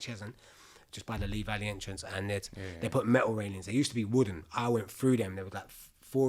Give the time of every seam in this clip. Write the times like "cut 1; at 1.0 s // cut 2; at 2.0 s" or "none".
none

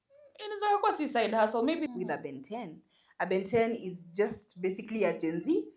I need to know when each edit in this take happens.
cut 1; at 1.9 s

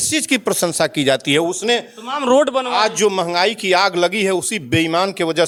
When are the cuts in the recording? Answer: none

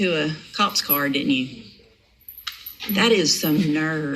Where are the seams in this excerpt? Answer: none

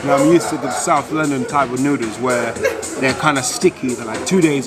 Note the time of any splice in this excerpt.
none

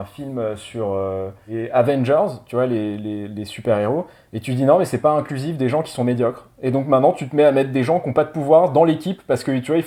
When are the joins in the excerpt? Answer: cut 1; at 1.5 s

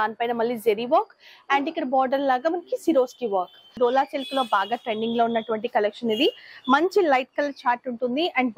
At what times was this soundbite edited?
cut 1; at 3.8 s

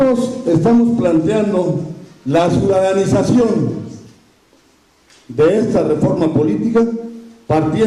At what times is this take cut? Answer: cut 1; at 3.5 s

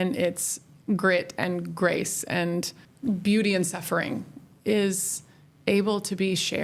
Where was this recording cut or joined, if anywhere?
cut 1; at 2.8 s

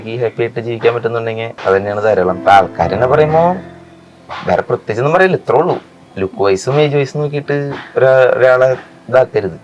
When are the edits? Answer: cut 1; at 1.5 s // cut 2; at 2.4 s

